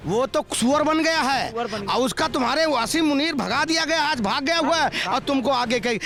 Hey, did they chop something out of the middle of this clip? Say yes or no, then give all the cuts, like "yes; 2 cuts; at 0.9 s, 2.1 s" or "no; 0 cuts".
no; 0 cuts